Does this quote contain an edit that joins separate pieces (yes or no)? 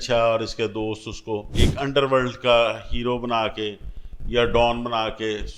yes